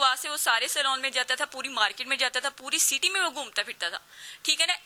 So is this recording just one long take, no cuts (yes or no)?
yes